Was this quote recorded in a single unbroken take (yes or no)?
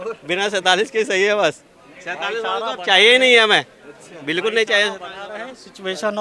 yes